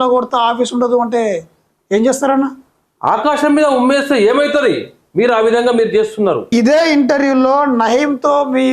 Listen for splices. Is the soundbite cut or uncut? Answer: cut